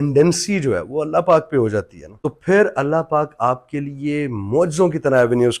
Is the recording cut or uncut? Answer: uncut